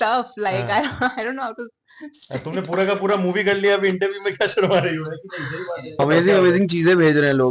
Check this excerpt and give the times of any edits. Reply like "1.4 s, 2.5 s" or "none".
6.0 s